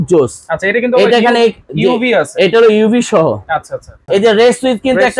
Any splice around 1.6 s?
no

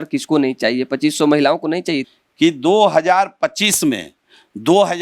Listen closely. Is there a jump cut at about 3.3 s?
no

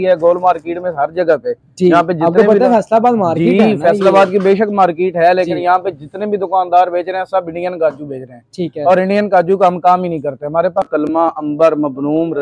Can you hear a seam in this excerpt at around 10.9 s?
yes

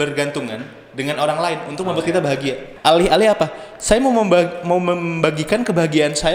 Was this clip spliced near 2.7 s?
yes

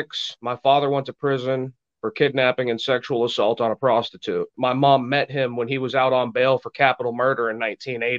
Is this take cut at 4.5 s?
yes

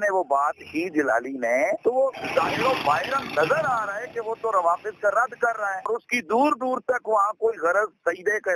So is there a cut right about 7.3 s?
no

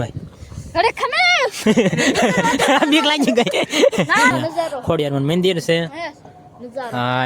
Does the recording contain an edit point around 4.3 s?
yes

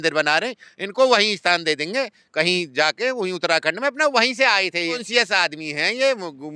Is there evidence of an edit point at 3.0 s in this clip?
no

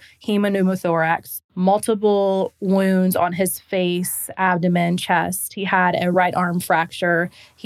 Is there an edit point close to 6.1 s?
yes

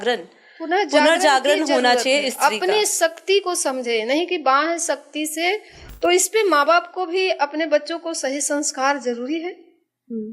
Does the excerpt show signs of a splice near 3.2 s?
no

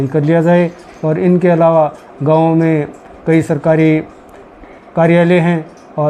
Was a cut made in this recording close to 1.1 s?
no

